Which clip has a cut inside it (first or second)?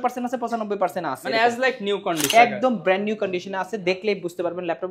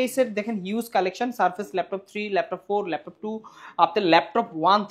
first